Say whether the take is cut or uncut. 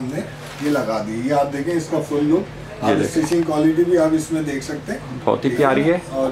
uncut